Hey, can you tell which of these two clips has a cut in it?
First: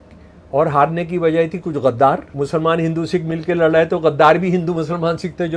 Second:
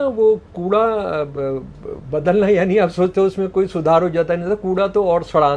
first; 1 cut; at 2.3 s

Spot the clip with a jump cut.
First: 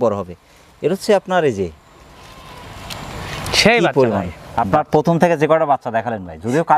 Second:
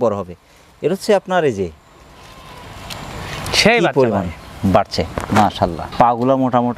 first; 1 cut; at 4.4 s

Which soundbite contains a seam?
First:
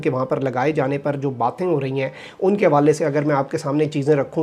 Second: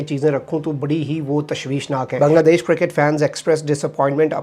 second; 1 cut; at 2.1 s

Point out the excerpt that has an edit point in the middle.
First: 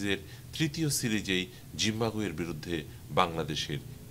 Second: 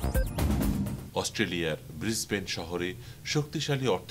second; 1 cut; at 1.0 s

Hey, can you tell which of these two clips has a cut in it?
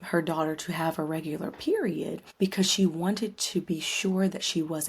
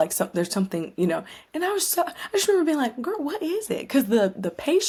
first; 1 cut; at 2.2 s

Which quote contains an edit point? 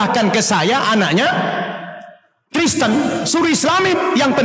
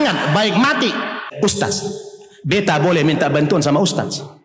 second; 1 cut; at 1.3 s

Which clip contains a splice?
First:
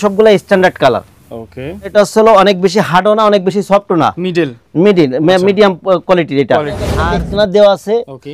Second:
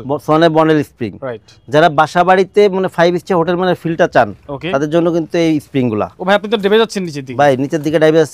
first; 2 cuts; at 1.9 s, 7.0 s

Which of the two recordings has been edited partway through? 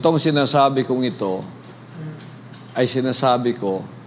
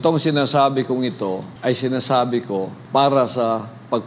second; 2 cuts; at 1.5 s, 2.8 s

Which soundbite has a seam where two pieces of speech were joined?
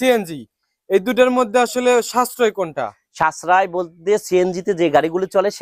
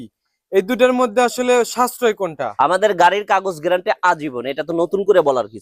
second; 1 cut; at 2.4 s

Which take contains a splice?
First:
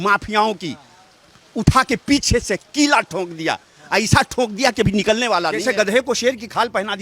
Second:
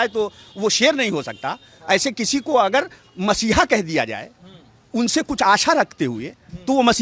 first; 1 cut; at 5.6 s

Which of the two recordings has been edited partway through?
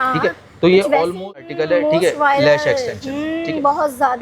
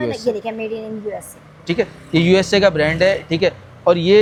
first; 1 cut; at 1.5 s

